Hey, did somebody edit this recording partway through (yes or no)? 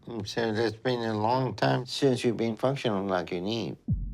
no